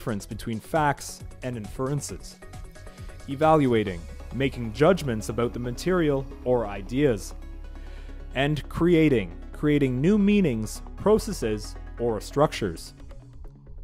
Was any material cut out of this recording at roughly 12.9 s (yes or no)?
yes